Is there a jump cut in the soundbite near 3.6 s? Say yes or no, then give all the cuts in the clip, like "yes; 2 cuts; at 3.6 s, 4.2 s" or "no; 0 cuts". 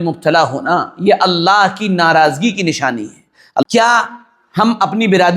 yes; 1 cut; at 3.6 s